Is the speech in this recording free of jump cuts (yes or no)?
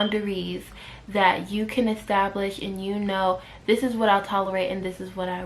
yes